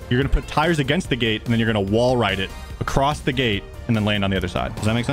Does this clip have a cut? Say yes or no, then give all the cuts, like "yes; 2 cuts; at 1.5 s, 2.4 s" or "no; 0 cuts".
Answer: no; 0 cuts